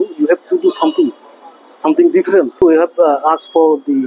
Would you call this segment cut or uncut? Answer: cut